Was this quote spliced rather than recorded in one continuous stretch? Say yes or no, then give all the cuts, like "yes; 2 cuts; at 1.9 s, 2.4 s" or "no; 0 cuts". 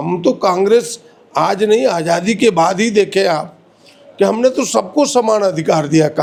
no; 0 cuts